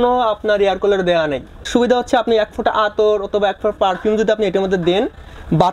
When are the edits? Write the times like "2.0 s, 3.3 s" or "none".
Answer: 1.6 s